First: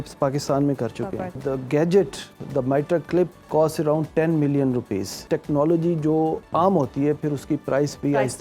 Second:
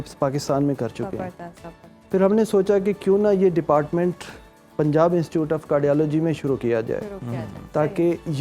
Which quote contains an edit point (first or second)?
first